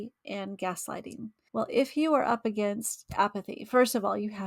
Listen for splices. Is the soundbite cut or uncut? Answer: cut